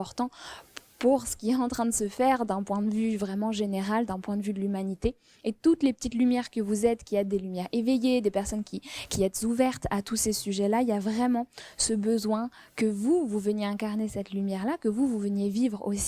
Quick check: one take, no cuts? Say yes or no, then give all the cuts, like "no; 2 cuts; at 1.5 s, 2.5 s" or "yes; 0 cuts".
yes; 0 cuts